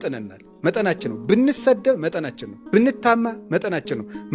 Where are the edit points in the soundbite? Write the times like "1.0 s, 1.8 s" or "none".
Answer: none